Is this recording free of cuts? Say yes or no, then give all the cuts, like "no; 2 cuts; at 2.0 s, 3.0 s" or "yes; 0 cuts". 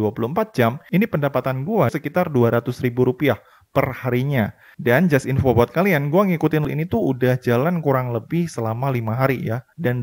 no; 2 cuts; at 1.9 s, 6.7 s